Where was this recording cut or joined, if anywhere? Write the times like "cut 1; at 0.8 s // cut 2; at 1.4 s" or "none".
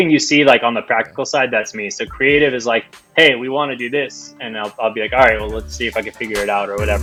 none